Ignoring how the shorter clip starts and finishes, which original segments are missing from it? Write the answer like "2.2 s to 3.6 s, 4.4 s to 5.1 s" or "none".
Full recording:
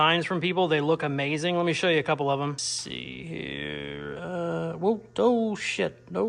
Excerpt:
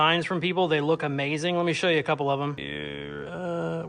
2.7 s to 3.6 s